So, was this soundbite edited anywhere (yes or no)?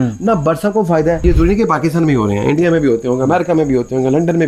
yes